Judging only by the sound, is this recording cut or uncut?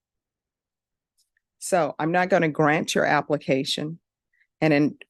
uncut